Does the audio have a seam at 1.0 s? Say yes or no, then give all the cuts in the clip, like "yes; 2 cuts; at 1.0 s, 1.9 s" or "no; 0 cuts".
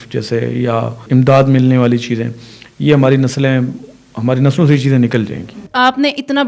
yes; 2 cuts; at 1.0 s, 5.6 s